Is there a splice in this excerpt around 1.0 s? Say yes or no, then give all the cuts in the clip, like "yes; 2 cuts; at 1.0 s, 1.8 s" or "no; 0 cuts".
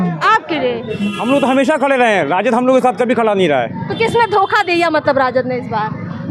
yes; 1 cut; at 1.0 s